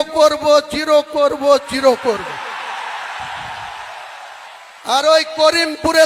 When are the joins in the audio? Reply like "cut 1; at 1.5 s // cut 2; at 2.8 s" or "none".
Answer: none